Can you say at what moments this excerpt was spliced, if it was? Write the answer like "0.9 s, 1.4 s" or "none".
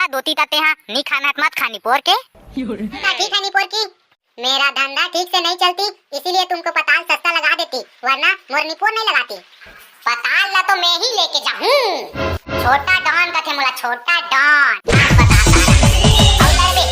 3.1 s, 9.7 s, 14.7 s